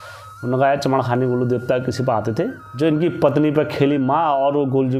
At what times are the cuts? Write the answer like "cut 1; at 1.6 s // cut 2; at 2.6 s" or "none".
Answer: cut 1; at 2.6 s